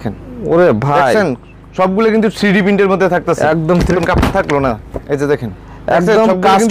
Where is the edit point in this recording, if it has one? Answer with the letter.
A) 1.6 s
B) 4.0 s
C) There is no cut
B